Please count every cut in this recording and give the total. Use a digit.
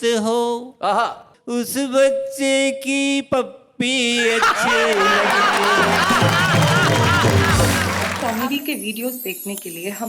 1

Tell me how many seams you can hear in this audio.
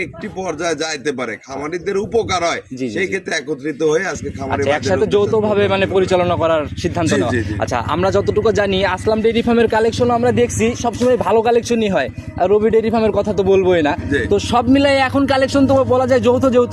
0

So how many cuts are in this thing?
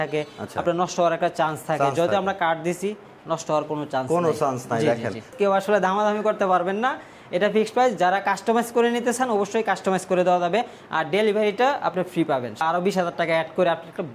2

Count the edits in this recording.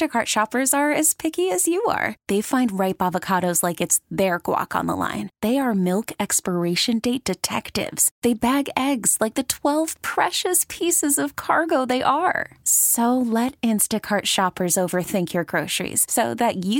0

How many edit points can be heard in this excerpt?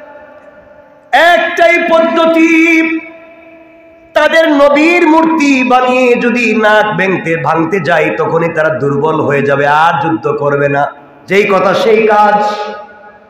1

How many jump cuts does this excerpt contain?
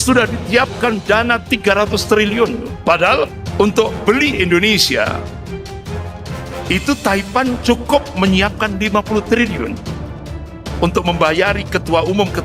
1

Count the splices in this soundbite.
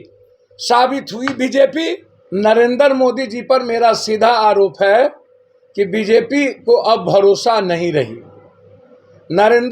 1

